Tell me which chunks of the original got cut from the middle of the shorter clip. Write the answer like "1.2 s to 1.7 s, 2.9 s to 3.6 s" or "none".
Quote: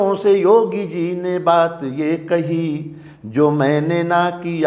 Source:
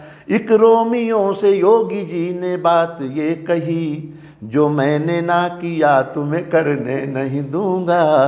none

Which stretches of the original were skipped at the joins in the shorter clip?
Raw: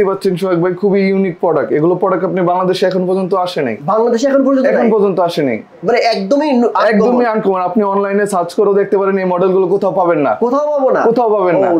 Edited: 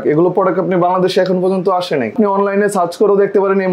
3.8 s to 7.7 s

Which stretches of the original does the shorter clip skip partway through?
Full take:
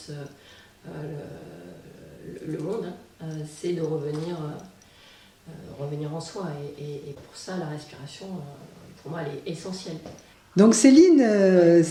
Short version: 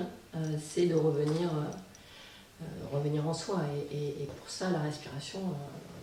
none

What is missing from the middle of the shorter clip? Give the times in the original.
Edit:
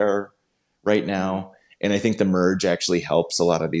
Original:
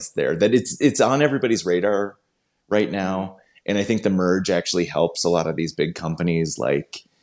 none

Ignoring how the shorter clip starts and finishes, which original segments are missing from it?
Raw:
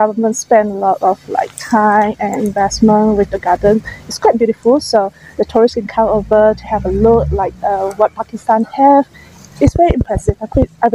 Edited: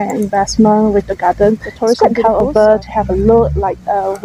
4.6 s to 6.1 s

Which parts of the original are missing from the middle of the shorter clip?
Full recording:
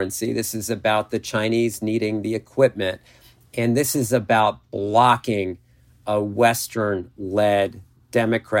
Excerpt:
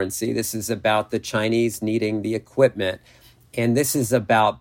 none

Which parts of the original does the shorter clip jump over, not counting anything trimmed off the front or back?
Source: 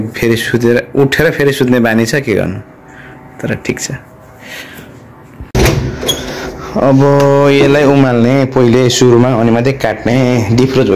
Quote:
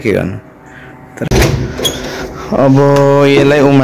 3.5 s to 5.5 s

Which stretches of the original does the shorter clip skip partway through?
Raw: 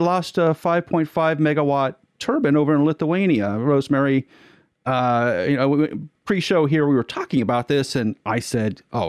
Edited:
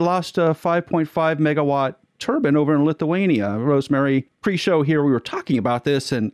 4.3 s to 6.2 s

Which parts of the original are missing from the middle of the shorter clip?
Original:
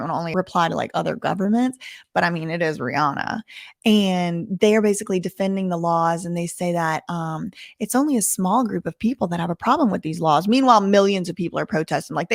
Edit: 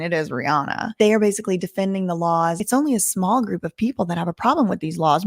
3.4 s to 4.5 s, 6.2 s to 7.8 s

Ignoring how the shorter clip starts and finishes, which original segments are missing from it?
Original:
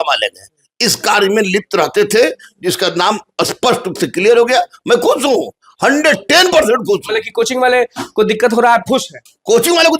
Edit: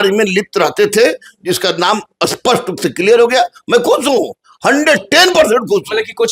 none

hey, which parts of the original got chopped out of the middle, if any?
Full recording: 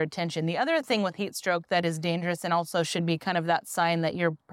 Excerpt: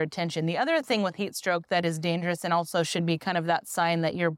none

